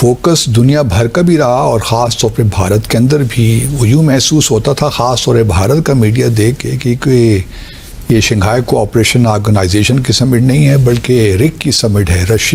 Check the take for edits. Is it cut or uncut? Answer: uncut